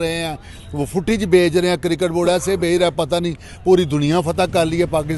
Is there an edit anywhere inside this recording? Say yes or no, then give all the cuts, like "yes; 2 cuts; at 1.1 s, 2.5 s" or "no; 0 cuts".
no; 0 cuts